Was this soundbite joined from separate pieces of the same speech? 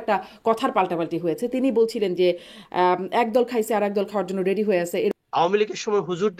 yes; 1 cut; at 5.2 s

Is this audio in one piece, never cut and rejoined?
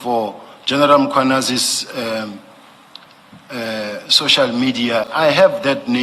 no; 1 cut; at 5.1 s

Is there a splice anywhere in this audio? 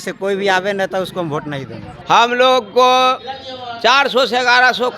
yes; 1 cut; at 1.9 s

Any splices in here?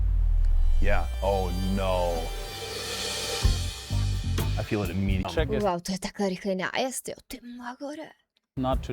yes; 1 cut; at 5.3 s

